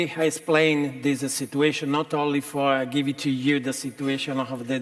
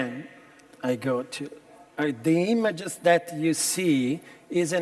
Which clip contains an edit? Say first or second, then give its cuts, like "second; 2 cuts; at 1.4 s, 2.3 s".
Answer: first; 1 cut; at 2.0 s